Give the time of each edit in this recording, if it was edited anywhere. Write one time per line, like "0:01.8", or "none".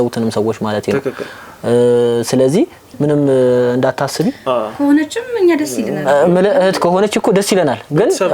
0:02.8

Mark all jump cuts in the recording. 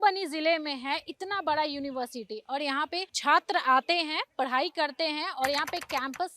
0:03.1

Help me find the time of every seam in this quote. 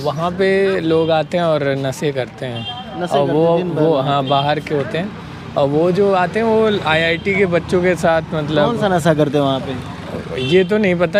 none

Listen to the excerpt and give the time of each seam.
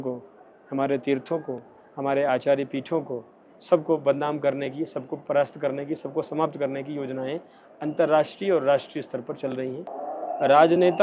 0:09.9

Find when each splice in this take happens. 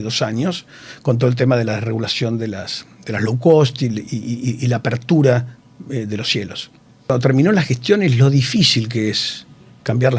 0:07.1

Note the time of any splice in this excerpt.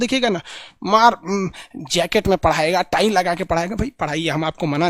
none

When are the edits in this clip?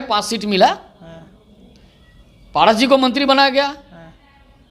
none

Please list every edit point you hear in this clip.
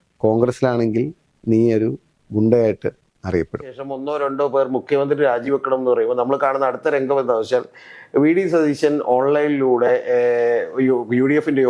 0:03.9

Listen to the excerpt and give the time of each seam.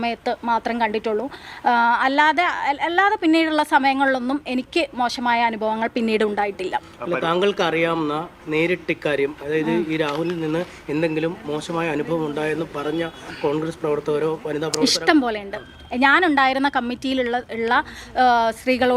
none

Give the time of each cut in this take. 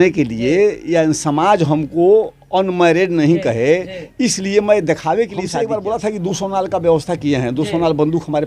0:05.6

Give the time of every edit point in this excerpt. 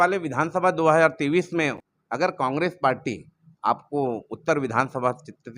0:01.8

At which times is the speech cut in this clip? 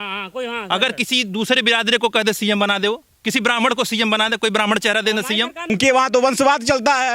0:05.7

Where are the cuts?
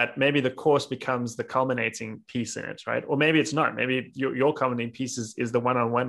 none

